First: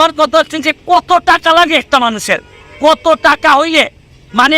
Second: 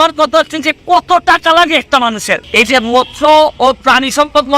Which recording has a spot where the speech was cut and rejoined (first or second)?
second